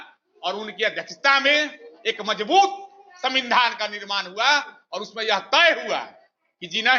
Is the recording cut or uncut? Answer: uncut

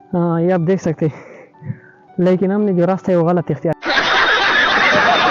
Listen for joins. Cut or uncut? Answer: cut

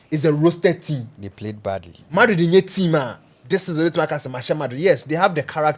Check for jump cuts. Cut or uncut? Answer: uncut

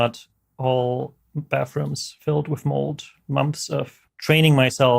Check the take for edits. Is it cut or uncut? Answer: cut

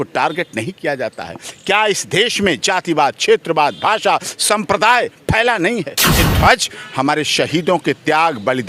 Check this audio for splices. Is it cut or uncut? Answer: cut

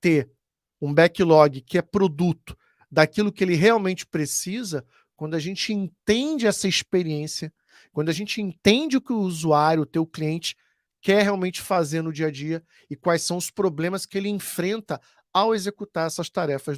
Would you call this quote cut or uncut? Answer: uncut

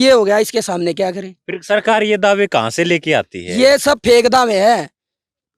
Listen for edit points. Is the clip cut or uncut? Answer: uncut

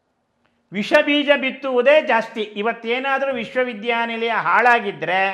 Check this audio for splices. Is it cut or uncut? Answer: uncut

